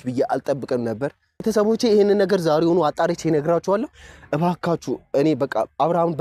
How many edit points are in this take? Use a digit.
1